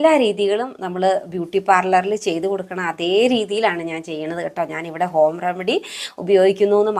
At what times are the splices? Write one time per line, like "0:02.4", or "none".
none